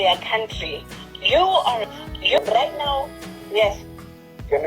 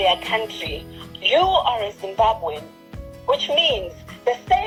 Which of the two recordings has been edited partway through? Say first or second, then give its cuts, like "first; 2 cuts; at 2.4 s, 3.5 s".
first; 1 cut; at 2.0 s